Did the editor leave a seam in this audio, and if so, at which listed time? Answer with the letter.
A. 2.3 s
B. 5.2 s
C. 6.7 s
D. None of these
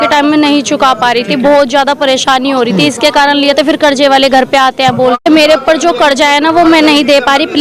B